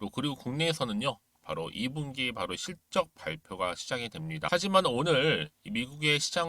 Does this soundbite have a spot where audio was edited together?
yes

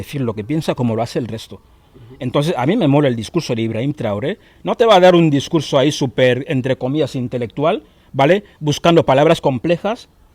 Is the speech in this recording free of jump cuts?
yes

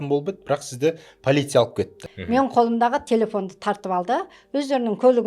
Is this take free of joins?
no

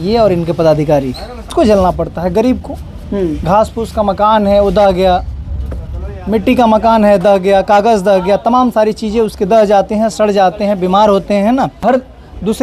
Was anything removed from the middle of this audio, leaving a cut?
yes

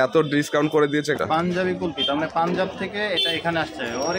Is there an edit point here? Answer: yes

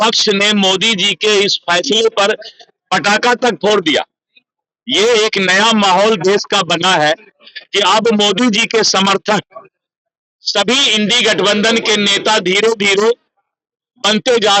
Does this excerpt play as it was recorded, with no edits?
yes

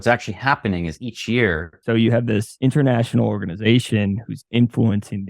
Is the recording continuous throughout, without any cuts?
no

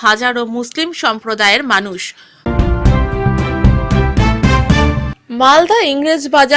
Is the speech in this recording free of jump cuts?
no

